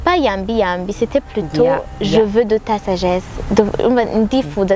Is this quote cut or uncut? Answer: uncut